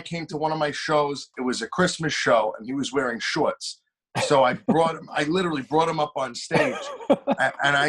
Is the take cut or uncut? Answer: cut